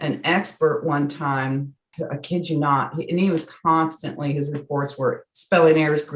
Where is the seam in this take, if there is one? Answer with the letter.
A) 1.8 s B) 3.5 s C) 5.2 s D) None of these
A